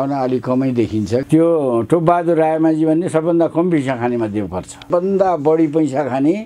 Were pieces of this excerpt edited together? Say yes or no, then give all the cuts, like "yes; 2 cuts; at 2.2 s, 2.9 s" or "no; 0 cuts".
yes; 2 cuts; at 1.2 s, 4.8 s